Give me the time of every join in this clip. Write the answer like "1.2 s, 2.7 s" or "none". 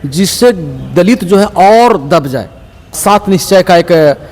3.0 s